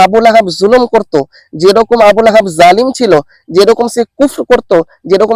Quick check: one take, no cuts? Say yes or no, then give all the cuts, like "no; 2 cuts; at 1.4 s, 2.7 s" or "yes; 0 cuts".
yes; 0 cuts